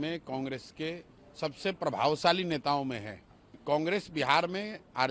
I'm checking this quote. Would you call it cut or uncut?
cut